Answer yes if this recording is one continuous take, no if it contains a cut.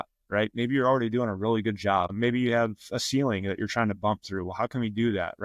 no